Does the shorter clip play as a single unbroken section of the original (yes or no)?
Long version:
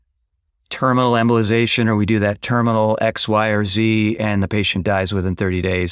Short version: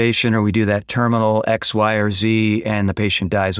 yes